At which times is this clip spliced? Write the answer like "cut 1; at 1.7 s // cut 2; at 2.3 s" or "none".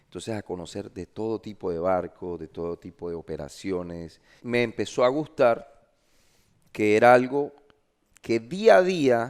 cut 1; at 4.3 s

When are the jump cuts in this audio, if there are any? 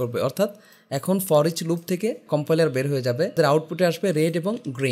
cut 1; at 2.2 s // cut 2; at 3.3 s

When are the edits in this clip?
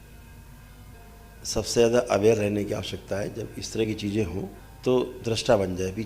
cut 1; at 0.9 s // cut 2; at 4.6 s

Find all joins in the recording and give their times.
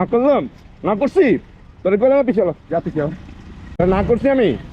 cut 1; at 3.8 s

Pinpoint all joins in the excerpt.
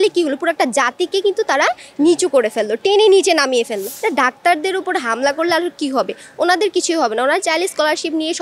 cut 1; at 3.9 s

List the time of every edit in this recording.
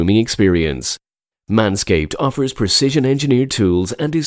none

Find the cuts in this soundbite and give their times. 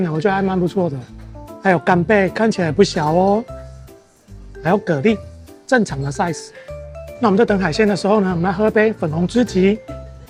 none

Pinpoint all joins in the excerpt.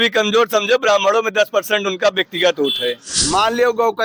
cut 1; at 3.1 s

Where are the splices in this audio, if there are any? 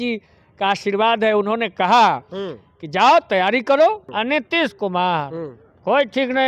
cut 1; at 4.1 s

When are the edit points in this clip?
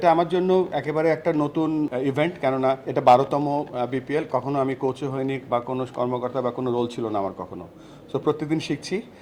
cut 1; at 1.9 s // cut 2; at 2.9 s

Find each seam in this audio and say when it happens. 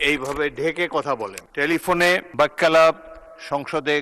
cut 1; at 1.4 s // cut 2; at 2.3 s

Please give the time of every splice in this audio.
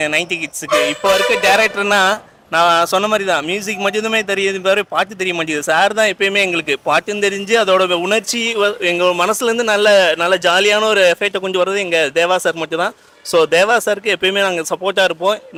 none

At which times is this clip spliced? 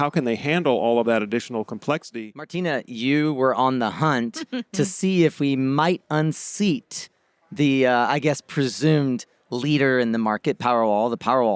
cut 1; at 2.1 s

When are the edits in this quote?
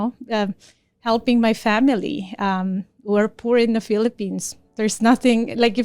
none

